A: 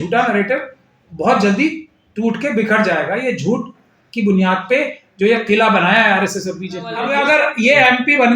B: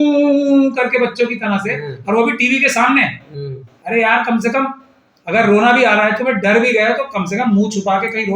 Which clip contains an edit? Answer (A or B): A